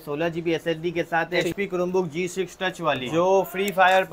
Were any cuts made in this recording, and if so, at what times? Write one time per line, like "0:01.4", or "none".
0:01.5
0:03.0

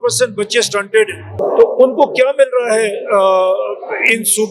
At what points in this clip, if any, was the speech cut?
0:01.3

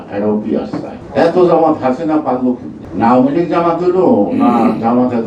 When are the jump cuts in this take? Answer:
0:01.0
0:02.8

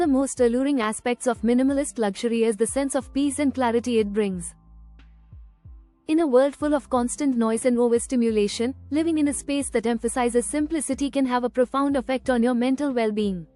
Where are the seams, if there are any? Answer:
none

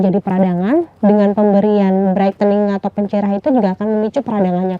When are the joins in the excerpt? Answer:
none

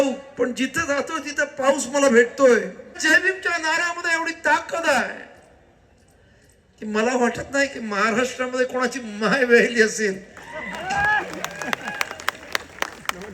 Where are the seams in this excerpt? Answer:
0:03.0

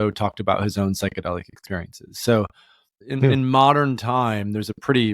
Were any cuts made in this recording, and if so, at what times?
0:03.0

